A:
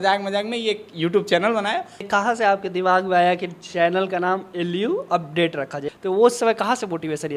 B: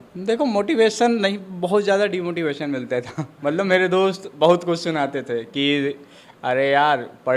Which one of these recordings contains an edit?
A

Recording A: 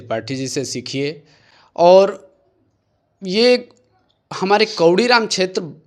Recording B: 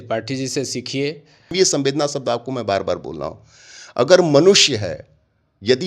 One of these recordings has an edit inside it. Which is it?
B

